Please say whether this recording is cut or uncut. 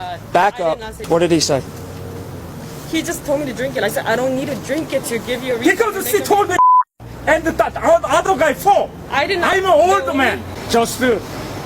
cut